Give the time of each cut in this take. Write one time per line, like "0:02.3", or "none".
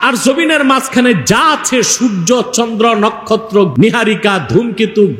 0:03.7